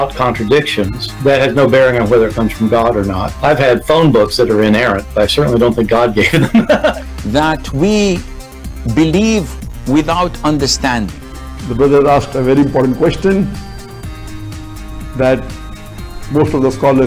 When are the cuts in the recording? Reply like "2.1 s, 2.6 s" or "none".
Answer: 1.3 s, 7.1 s